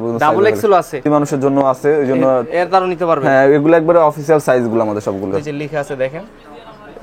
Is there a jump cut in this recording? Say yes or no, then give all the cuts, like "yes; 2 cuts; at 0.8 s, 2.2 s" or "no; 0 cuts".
yes; 2 cuts; at 1.1 s, 5.3 s